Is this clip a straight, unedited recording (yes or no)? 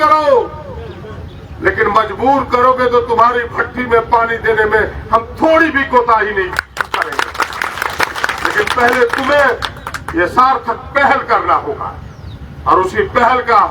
yes